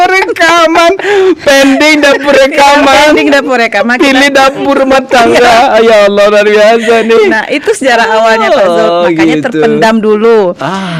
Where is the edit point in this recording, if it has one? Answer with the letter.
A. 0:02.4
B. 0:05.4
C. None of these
C